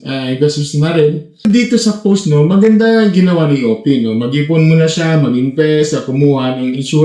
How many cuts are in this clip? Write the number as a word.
one